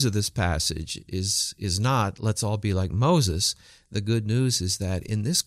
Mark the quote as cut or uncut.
uncut